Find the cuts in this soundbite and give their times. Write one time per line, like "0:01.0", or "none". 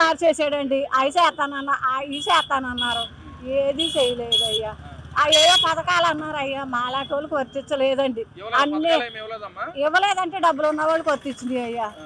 none

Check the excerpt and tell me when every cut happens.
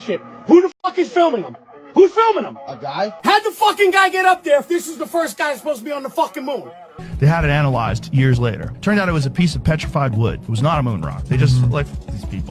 0:07.0

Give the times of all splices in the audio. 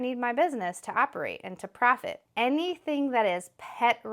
0:02.2

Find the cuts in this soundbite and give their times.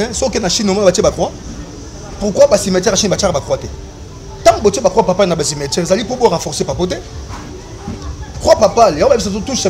none

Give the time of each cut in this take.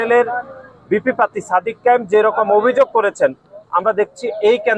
none

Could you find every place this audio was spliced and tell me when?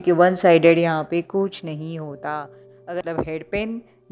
0:03.0

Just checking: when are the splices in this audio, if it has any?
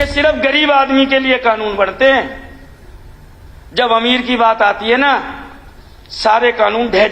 none

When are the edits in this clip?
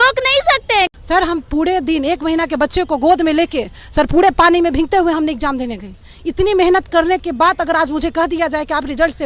0:01.1

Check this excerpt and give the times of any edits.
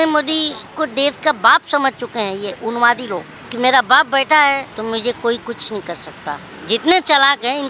0:03.4
0:04.7
0:06.5

